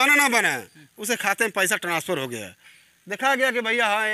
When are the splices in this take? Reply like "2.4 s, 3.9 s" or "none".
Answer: none

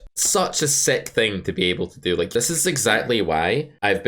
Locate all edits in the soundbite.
2.3 s

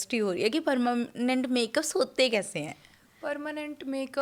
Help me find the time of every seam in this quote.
none

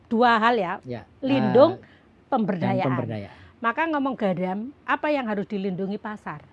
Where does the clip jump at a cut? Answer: none

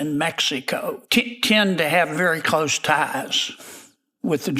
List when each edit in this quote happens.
1.0 s

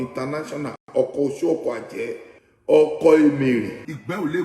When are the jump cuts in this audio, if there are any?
none

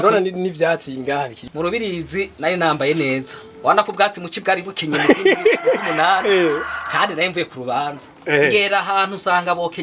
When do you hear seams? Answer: 1.4 s

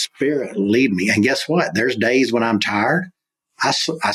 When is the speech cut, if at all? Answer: none

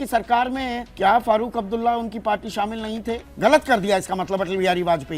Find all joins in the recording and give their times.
3.2 s

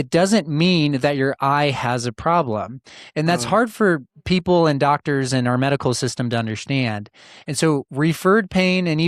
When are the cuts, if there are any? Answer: none

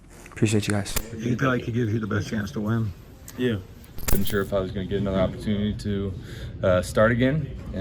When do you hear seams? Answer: 0.9 s, 4.1 s

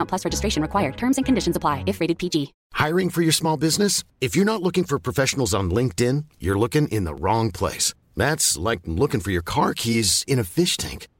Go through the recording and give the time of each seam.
2.6 s

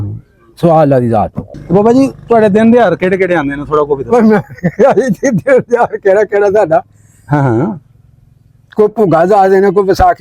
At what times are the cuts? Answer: 1.4 s

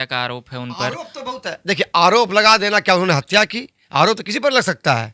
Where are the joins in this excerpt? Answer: none

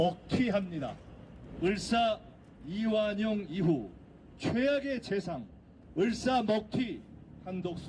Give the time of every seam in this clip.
none

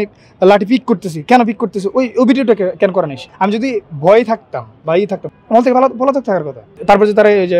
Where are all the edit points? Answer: 3.2 s, 5.3 s, 6.7 s

